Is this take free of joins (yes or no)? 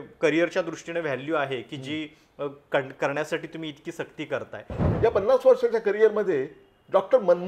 no